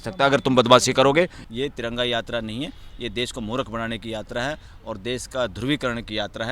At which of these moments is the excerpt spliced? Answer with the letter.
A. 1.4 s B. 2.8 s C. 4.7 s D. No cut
A